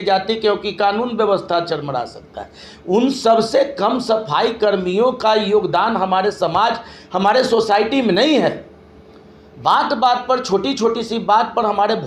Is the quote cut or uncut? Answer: uncut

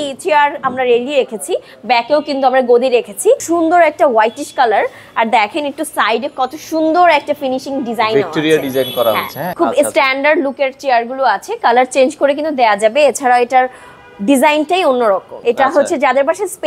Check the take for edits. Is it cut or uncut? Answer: cut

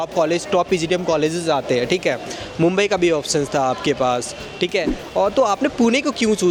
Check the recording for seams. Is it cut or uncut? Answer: uncut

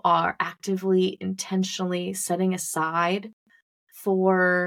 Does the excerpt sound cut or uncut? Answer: uncut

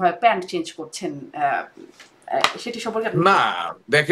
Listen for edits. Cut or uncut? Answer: uncut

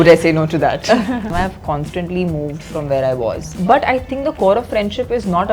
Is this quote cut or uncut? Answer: cut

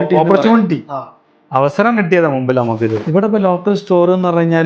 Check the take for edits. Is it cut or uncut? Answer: cut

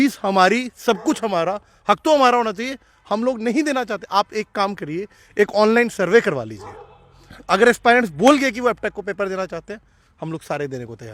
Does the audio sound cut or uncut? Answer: uncut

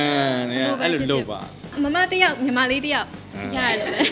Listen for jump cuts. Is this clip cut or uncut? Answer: cut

